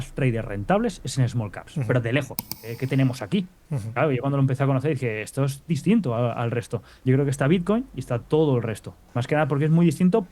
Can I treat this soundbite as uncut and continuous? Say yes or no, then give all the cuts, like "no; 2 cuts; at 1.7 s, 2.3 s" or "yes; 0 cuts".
no; 2 cuts; at 2.6 s, 6.8 s